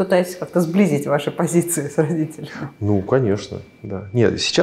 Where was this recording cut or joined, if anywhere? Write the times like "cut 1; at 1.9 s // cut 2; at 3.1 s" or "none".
none

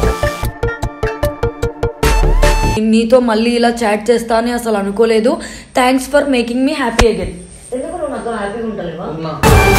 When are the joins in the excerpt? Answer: cut 1; at 2.8 s

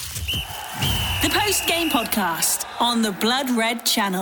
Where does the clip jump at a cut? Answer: none

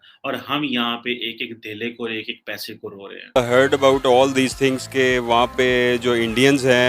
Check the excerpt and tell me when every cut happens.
cut 1; at 3.4 s

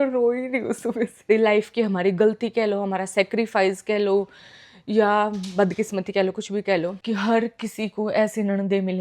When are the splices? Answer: cut 1; at 1.3 s // cut 2; at 7.0 s

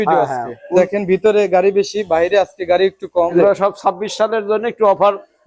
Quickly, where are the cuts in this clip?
cut 1; at 0.7 s // cut 2; at 3.3 s

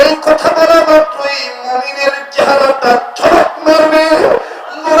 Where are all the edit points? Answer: none

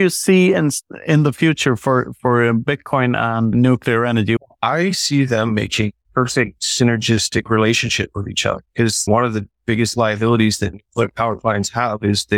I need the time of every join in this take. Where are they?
cut 1; at 3.5 s // cut 2; at 4.4 s // cut 3; at 6.4 s // cut 4; at 9.1 s

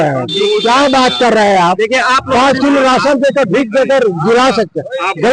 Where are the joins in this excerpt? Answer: none

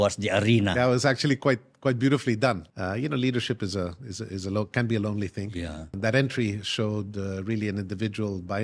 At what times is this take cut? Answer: cut 1; at 2.7 s // cut 2; at 5.9 s

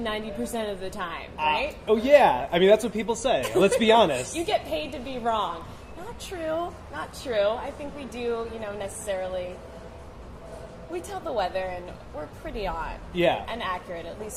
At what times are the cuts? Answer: none

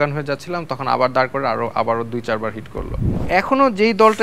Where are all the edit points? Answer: cut 1; at 3.2 s

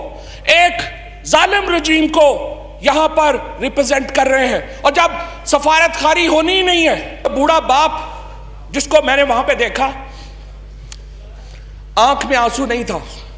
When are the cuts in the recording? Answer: cut 1; at 7.2 s

